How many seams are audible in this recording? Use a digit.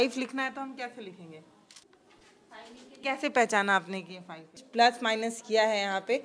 3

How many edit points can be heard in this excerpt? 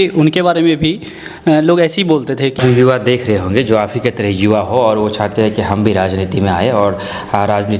1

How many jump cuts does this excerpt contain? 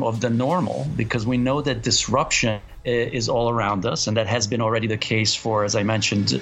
1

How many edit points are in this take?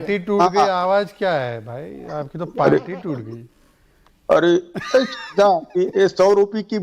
1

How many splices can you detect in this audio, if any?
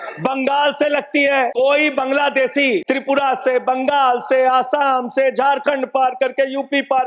2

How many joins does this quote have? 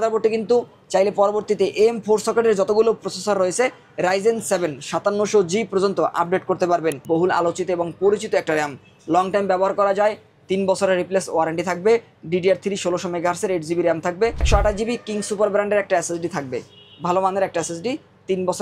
2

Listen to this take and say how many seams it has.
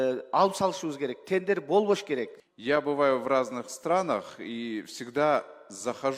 1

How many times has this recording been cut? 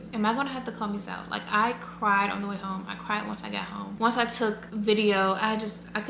0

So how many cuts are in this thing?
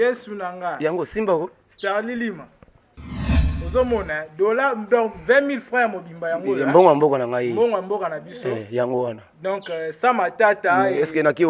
0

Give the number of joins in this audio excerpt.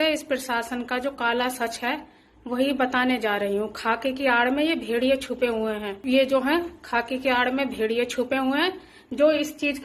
1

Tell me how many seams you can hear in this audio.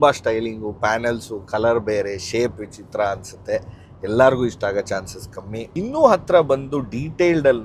1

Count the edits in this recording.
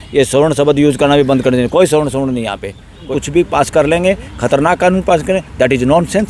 1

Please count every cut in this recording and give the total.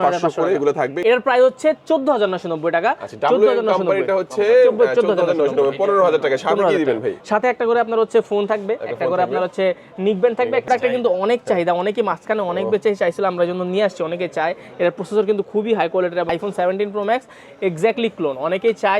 3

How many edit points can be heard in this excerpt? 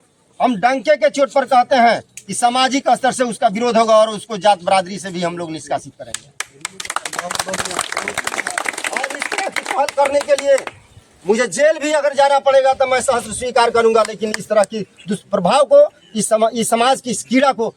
0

